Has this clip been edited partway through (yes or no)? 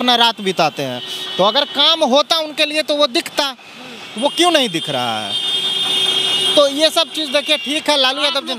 no